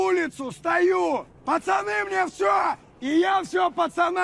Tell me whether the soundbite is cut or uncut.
uncut